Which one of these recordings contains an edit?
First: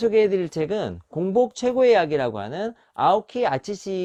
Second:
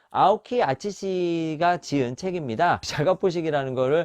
second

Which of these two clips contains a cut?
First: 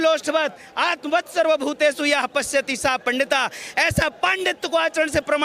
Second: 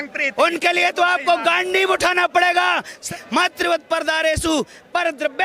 second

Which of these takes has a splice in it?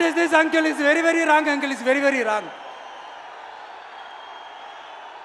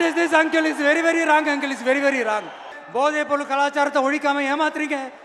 second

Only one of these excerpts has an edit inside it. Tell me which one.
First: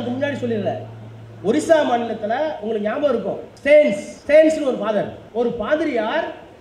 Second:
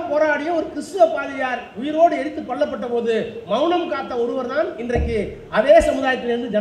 first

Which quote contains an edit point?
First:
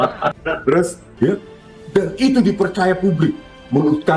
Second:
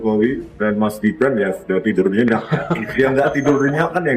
first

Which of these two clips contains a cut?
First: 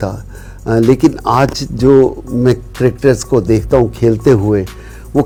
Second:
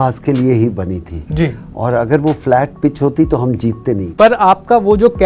second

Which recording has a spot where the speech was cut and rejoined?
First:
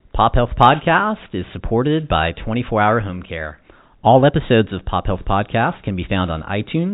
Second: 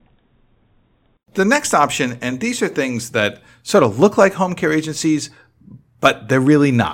second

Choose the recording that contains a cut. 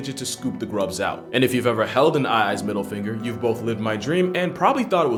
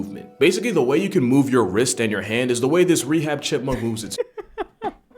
second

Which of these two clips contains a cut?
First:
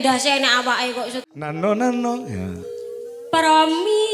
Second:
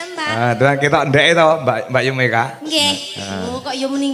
first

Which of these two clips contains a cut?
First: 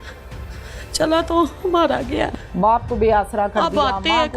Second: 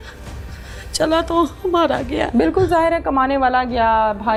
first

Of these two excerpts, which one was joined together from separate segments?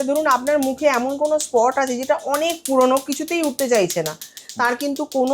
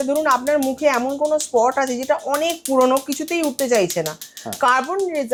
first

